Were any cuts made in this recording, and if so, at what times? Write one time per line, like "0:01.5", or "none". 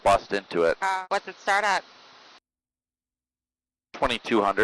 0:00.9